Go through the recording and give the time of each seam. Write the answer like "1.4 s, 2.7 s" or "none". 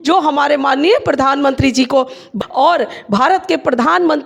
2.3 s